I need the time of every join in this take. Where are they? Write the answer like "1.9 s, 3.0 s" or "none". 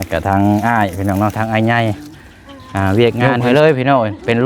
3.2 s